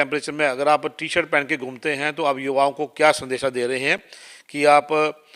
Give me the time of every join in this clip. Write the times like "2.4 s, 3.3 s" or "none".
none